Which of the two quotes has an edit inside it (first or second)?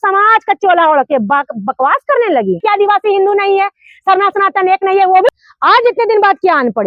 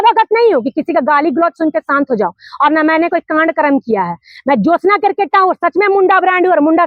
first